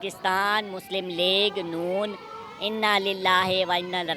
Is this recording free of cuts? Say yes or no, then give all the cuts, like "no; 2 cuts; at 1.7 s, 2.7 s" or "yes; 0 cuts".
yes; 0 cuts